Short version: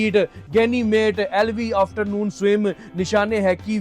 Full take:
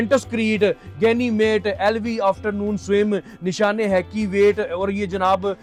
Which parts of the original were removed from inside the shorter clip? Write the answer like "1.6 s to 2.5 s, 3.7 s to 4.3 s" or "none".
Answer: none